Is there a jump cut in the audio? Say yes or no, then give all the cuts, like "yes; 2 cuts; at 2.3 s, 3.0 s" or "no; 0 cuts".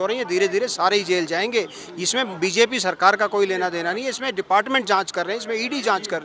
no; 0 cuts